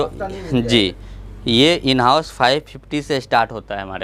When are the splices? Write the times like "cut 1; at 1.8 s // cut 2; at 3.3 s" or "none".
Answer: none